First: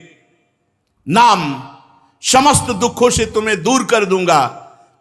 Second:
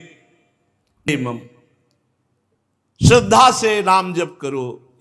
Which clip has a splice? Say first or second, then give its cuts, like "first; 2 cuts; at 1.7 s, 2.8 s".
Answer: second; 1 cut; at 1.1 s